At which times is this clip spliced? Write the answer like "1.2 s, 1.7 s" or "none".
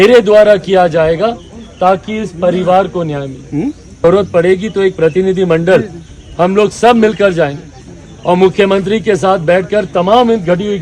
4.0 s